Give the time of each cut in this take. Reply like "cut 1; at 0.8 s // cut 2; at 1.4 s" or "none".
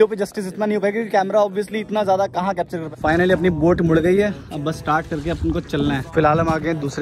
cut 1; at 2.8 s // cut 2; at 6.1 s